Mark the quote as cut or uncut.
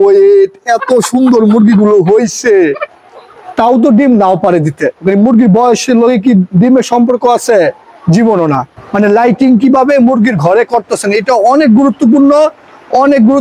cut